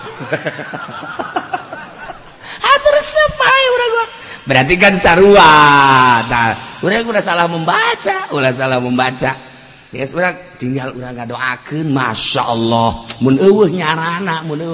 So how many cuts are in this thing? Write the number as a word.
zero